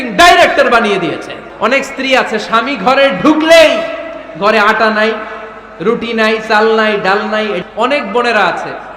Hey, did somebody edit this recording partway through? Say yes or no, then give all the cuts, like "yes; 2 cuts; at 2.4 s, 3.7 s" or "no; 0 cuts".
yes; 2 cuts; at 1.4 s, 7.6 s